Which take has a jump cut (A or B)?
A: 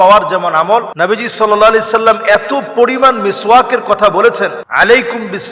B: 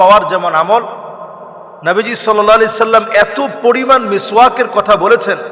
A